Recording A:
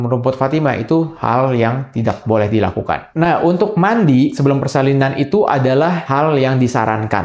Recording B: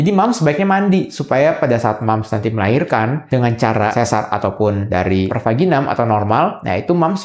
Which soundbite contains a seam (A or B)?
A